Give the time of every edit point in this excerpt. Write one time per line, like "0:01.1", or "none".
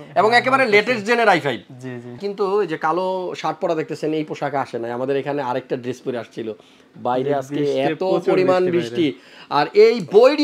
0:02.2